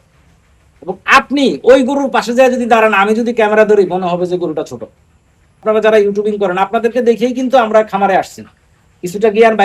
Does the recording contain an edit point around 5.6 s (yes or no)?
yes